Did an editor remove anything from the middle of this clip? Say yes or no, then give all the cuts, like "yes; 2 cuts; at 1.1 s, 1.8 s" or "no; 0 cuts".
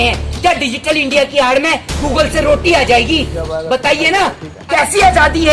yes; 1 cut; at 4.6 s